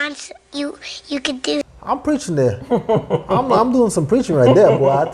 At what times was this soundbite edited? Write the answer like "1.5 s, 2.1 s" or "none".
1.7 s